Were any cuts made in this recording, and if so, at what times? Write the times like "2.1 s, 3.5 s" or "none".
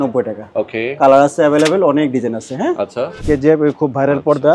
3.2 s